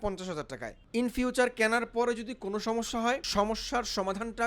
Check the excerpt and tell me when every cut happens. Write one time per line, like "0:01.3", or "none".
0:00.9
0:03.3